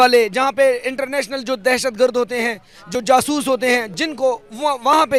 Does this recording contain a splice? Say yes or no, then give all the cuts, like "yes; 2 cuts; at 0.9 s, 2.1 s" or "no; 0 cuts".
no; 0 cuts